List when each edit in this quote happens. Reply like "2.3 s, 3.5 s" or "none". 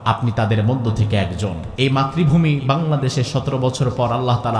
1.6 s